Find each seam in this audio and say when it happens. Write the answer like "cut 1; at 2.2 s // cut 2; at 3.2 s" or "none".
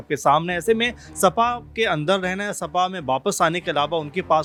none